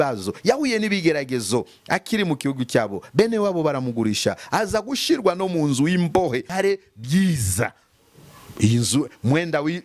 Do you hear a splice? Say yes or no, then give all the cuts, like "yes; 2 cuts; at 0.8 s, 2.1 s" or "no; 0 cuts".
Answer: yes; 1 cut; at 6.5 s